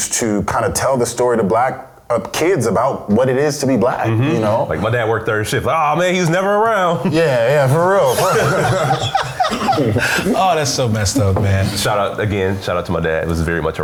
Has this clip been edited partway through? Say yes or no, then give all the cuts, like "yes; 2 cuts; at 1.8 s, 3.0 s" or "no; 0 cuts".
no; 0 cuts